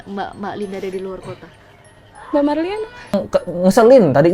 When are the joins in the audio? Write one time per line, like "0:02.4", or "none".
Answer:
0:03.1

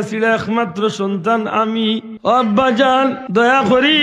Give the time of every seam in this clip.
0:02.1
0:03.2

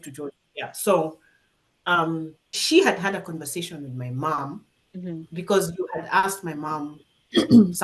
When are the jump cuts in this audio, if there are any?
0:02.6

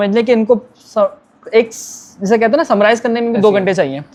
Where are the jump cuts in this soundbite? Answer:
none

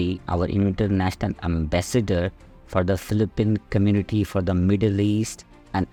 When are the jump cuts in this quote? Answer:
none

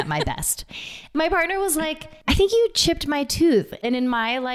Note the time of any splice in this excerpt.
0:01.0
0:02.1
0:03.8

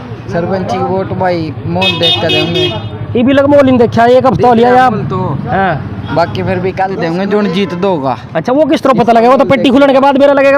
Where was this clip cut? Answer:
0:06.9

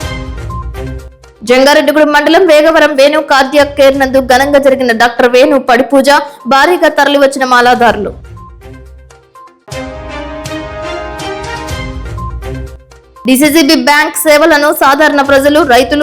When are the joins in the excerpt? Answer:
0:01.1

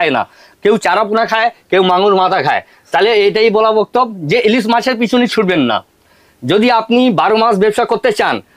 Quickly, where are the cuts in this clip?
none

